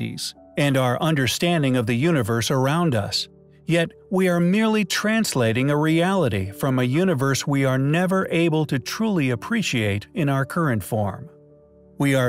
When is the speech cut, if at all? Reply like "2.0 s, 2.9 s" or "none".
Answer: 8.9 s

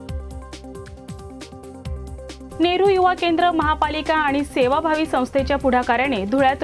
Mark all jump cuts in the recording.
1.3 s

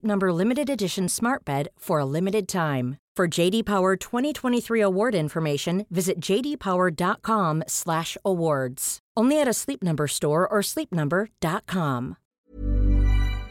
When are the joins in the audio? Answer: 12.5 s

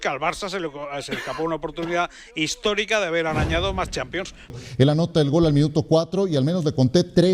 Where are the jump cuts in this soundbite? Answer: 4.6 s

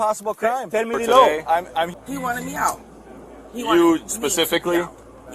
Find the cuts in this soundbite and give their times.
1.9 s

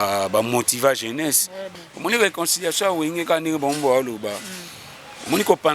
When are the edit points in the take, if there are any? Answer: 1.6 s

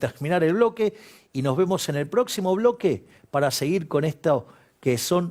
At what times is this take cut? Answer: none

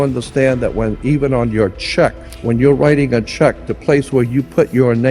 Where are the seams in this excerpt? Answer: 2.3 s

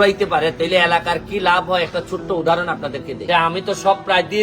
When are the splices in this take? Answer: 3.3 s

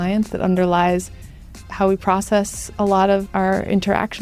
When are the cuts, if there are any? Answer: 1.5 s, 3.2 s

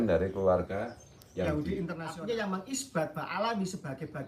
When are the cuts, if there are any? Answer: 2.1 s

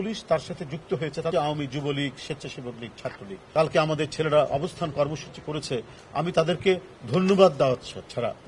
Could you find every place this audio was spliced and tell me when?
1.3 s, 3.4 s

